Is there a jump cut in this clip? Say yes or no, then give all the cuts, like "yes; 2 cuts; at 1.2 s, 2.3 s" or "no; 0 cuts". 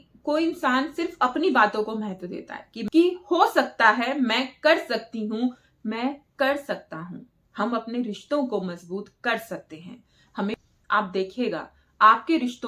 yes; 2 cuts; at 2.7 s, 10.6 s